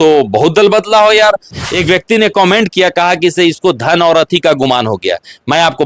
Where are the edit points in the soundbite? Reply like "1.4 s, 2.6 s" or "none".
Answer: 1.5 s